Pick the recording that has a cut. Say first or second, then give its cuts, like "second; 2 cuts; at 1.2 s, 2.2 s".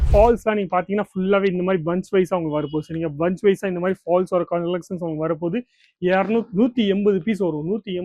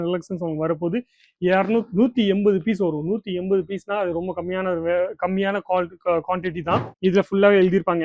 second; 1 cut; at 6.9 s